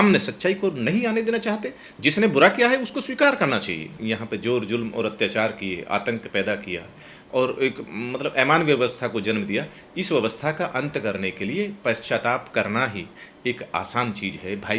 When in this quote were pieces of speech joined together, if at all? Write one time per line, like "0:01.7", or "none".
0:03.9

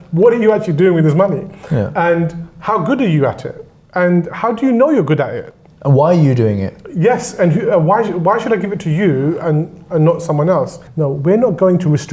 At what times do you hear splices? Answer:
0:10.8

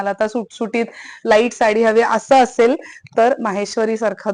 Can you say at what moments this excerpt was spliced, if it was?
none

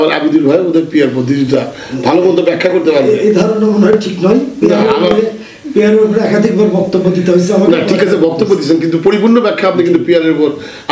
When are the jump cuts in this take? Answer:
none

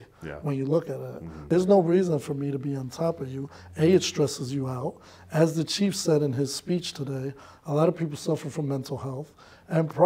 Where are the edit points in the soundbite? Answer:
0:01.4

